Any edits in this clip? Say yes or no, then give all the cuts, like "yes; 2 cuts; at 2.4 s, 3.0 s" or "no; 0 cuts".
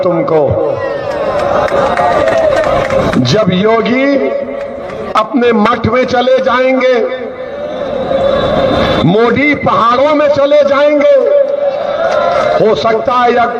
no; 0 cuts